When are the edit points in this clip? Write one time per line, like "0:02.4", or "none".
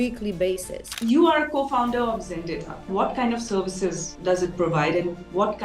0:00.9
0:02.8

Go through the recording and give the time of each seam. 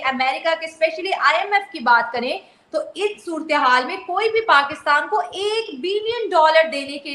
none

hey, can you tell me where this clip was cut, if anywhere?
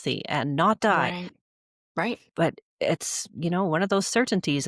none

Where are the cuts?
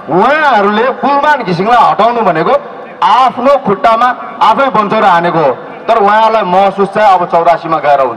none

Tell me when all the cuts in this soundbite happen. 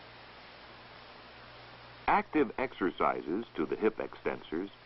0:03.2

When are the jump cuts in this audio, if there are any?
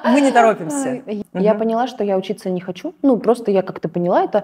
0:01.1

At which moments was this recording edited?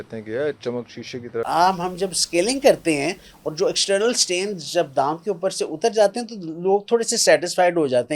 0:01.4

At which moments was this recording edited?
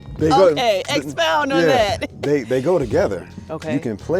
0:03.3

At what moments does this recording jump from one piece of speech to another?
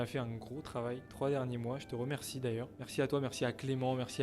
0:01.1
0:02.8

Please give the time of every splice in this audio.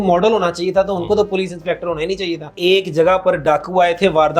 0:02.6

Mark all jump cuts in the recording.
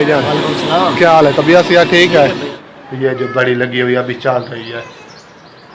0:02.5

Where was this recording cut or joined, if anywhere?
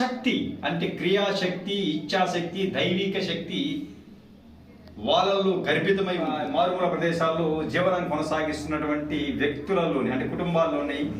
0:06.4

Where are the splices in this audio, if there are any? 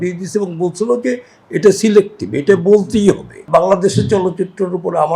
0:03.5

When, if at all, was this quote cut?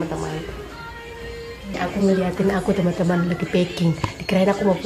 0:01.7

